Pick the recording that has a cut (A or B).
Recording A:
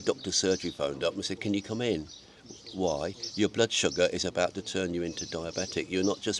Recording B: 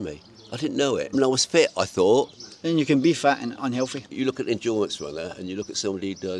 B